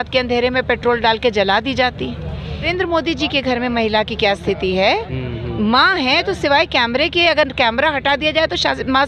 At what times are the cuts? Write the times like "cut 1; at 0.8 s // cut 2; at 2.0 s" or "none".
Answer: cut 1; at 2.7 s